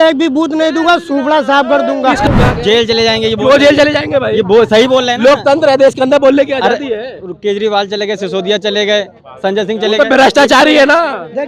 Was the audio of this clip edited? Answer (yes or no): yes